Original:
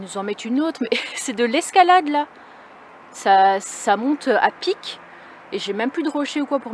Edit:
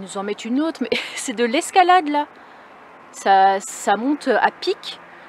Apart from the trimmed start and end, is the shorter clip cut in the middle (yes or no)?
no